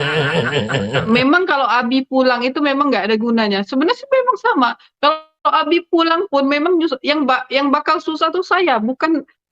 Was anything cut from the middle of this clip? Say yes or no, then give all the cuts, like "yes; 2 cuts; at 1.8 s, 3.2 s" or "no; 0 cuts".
yes; 1 cut; at 1.0 s